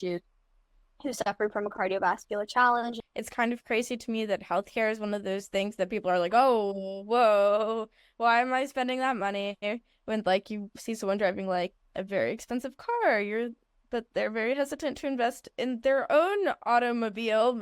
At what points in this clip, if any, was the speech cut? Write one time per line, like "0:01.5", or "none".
0:03.0